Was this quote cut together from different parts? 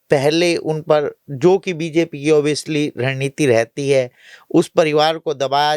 no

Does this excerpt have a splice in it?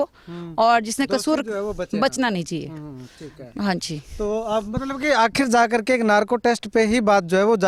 no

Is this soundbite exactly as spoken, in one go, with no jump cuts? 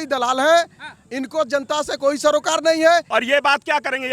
no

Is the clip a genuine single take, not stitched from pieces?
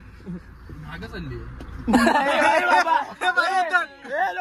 yes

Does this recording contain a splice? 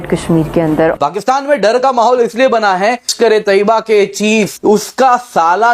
yes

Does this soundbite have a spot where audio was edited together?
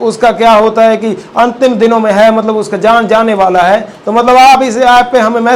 no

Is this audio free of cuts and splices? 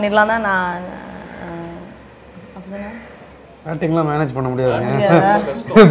yes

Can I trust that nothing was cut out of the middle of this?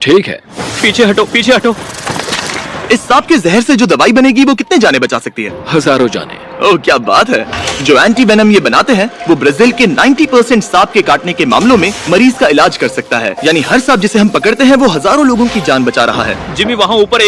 yes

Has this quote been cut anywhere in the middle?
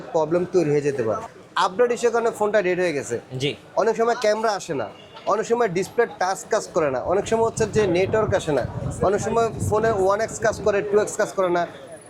yes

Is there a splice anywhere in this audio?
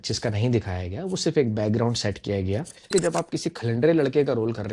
yes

